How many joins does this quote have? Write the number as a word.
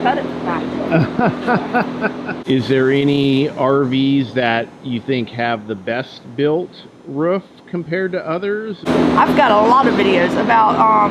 two